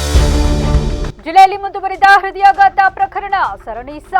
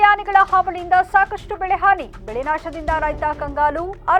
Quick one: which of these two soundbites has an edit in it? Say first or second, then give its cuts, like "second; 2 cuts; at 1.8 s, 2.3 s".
first; 1 cut; at 0.9 s